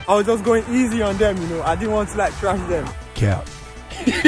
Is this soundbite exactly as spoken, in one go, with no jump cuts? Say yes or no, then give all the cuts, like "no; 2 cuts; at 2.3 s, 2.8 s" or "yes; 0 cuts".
yes; 0 cuts